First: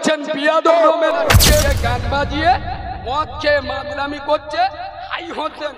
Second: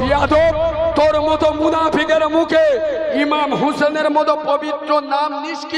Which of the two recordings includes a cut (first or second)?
first